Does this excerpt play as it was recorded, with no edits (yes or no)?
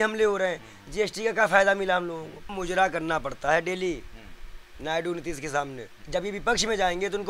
no